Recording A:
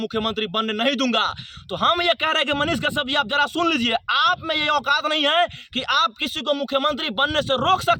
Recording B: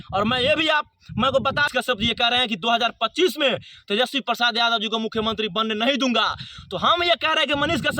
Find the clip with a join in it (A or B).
B